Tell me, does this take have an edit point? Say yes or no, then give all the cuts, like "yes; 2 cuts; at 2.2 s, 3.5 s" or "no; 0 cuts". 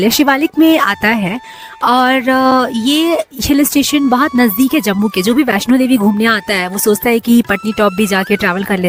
no; 0 cuts